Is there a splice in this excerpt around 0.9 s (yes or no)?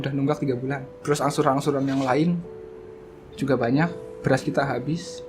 yes